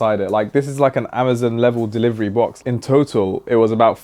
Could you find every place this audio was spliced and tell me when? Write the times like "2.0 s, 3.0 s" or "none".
2.6 s